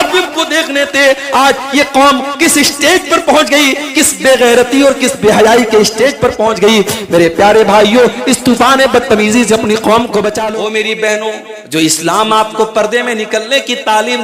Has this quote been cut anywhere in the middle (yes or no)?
yes